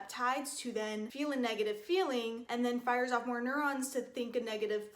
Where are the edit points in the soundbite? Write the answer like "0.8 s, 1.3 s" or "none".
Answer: 1.1 s